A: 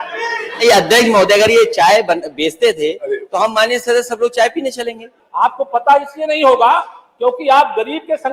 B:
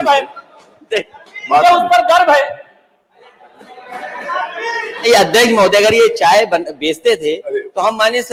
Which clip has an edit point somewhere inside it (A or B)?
A